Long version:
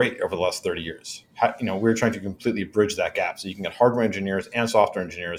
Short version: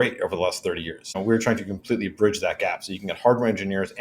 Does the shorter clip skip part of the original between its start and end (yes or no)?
yes